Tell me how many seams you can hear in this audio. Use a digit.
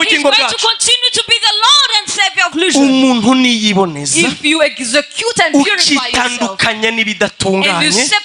1